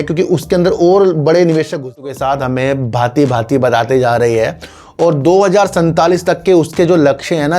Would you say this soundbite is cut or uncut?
cut